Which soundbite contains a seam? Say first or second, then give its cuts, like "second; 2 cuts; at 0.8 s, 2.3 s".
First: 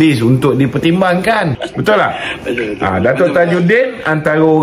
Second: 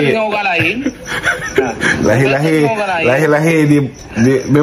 first; 1 cut; at 1.6 s